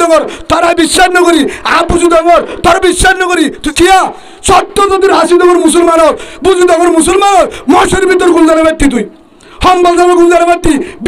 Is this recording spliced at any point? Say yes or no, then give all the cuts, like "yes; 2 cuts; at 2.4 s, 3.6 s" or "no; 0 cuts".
yes; 1 cut; at 3.6 s